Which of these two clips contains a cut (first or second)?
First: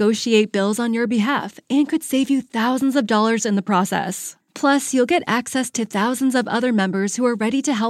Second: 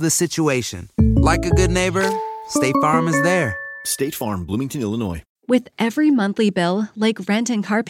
second